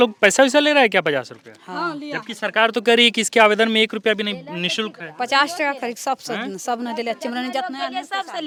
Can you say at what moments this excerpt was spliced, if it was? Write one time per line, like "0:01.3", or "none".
none